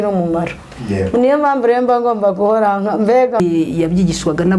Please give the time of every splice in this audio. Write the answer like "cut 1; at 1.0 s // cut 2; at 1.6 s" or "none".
cut 1; at 3.4 s

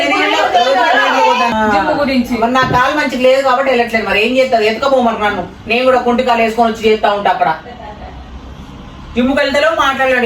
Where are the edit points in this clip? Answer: cut 1; at 1.5 s

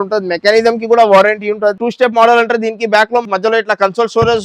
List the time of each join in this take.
cut 1; at 1.9 s // cut 2; at 3.2 s

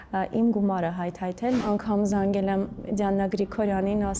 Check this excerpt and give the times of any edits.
cut 1; at 1.6 s

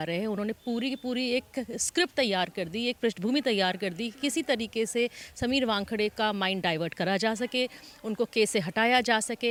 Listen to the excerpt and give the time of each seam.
none

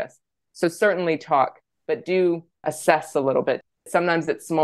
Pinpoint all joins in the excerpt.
cut 1; at 2.6 s // cut 2; at 3.8 s

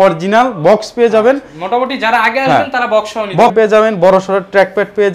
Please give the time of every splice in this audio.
cut 1; at 3.5 s

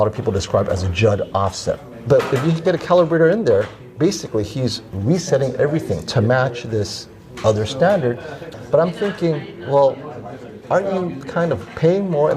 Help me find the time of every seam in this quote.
cut 1; at 1.8 s // cut 2; at 8.4 s

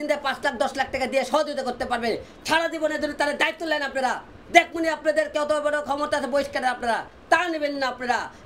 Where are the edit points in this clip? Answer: none

